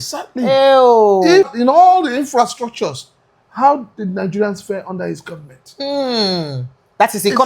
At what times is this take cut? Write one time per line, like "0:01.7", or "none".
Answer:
0:01.5